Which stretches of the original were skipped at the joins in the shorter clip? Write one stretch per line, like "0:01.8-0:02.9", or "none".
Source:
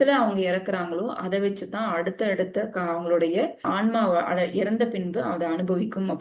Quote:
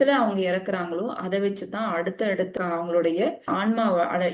0:02.5-0:02.7